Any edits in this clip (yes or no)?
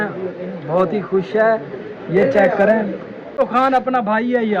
yes